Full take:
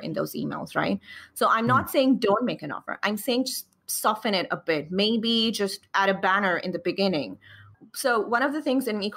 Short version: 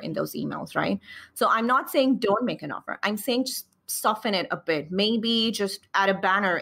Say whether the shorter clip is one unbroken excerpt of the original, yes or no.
yes